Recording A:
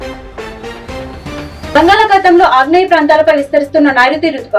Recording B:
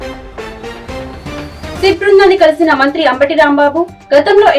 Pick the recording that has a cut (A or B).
A